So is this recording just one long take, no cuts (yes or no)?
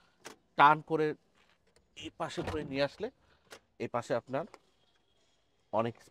yes